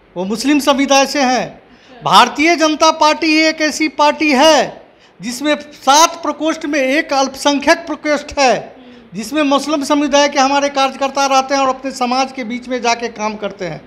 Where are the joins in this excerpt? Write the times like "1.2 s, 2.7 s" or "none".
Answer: none